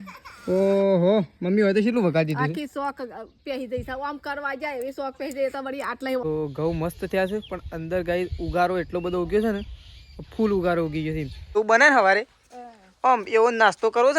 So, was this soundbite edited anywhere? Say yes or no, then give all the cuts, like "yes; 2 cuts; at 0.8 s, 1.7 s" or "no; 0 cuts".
yes; 2 cuts; at 6.2 s, 11.6 s